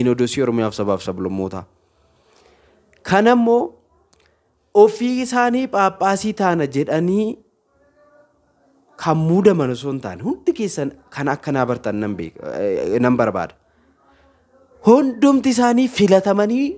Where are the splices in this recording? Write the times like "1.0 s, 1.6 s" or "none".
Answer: none